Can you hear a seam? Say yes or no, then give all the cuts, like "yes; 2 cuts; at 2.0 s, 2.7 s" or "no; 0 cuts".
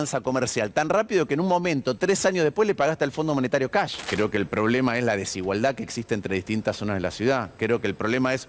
yes; 1 cut; at 4.0 s